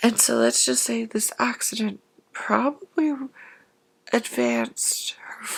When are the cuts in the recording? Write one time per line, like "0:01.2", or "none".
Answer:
none